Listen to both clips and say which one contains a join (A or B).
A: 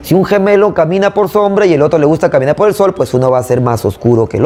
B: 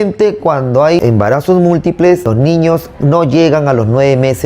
B